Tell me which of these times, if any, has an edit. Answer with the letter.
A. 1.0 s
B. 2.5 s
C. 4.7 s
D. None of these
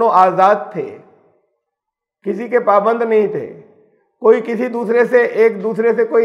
D